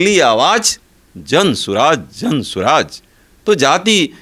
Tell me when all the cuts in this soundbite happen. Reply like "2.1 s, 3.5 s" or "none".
none